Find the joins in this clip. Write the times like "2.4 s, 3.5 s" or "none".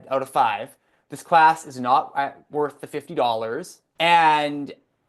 3.8 s